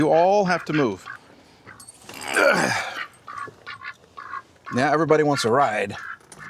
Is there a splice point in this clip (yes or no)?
no